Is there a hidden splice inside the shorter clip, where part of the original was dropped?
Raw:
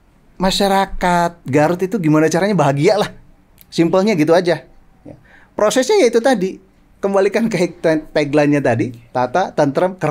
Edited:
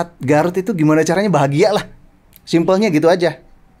no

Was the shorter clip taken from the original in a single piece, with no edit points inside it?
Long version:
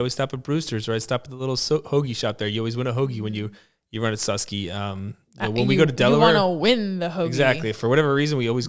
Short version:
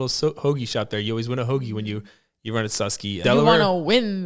no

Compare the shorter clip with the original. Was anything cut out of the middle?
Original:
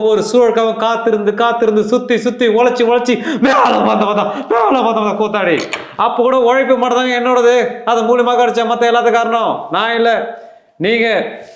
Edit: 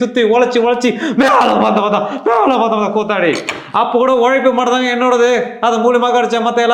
no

